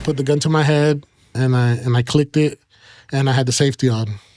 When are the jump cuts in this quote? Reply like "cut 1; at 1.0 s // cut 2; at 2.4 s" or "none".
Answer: cut 1; at 1.4 s